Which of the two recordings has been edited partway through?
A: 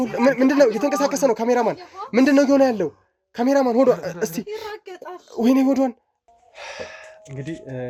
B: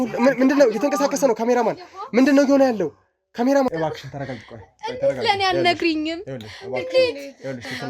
B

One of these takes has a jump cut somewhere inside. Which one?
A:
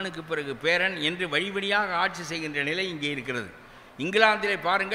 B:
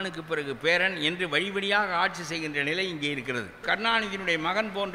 B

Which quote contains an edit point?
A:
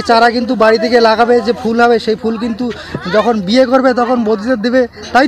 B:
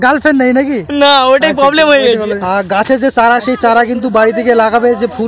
B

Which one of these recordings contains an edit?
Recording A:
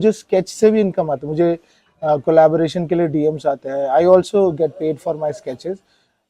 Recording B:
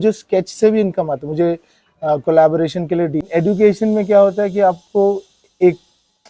B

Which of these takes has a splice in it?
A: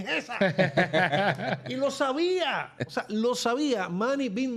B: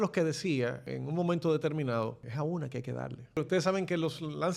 B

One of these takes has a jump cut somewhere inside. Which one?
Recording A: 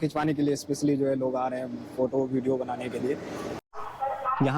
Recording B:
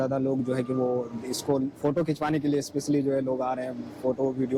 A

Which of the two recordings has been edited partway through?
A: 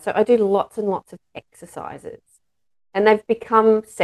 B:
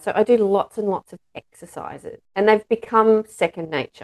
B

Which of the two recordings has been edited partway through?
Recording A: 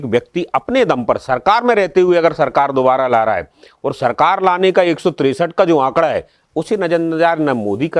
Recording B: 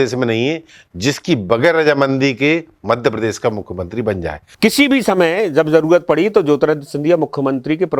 B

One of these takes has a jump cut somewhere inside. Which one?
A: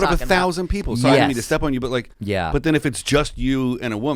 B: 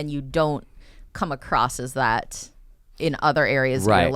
A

